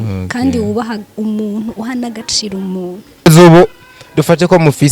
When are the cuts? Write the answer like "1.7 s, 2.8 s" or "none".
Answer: 3.3 s